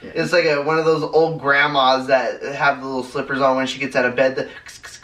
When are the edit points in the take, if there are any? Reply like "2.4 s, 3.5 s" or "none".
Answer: none